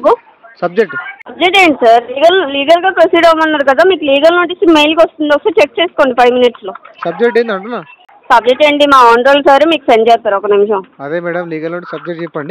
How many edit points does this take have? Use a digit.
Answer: 0